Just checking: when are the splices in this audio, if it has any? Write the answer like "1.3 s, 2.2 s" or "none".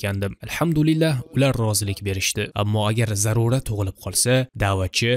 2.5 s